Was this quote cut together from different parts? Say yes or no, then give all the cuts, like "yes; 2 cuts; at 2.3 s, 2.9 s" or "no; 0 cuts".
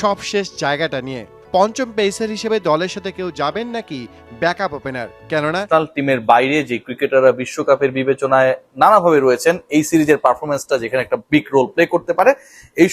yes; 1 cut; at 5.6 s